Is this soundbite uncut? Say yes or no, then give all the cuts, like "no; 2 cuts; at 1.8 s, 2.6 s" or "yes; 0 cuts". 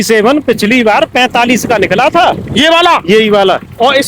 yes; 0 cuts